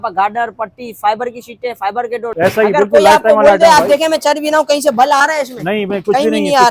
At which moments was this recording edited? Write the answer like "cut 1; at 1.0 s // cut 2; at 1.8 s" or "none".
cut 1; at 2.2 s